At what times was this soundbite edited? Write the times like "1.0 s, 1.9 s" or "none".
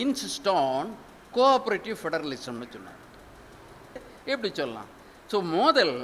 4.1 s